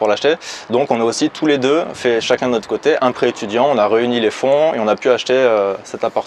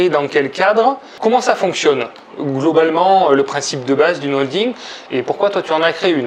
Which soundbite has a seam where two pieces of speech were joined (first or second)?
second